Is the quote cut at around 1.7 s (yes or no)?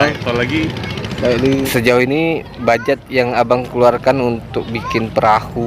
yes